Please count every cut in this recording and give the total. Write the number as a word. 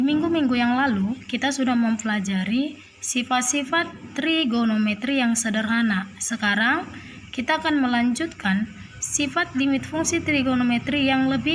zero